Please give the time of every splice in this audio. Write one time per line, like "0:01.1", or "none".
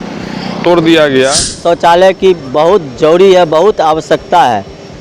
0:01.6